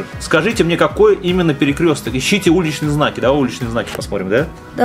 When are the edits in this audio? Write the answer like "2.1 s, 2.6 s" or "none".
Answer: none